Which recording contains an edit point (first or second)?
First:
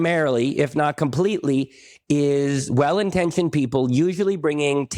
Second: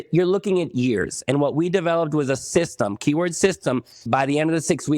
second